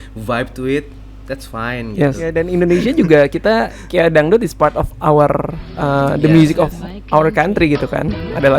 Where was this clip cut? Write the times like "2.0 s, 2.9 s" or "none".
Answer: 2.4 s